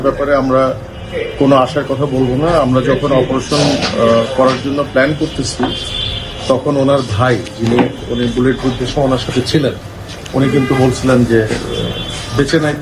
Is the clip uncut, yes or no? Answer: yes